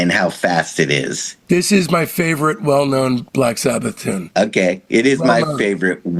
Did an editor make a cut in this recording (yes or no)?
yes